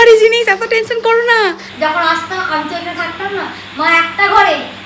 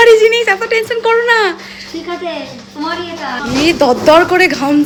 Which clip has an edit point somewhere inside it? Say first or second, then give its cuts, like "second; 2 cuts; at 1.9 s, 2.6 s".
first; 1 cut; at 1.7 s